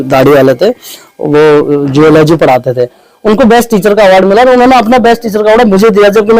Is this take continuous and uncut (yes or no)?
yes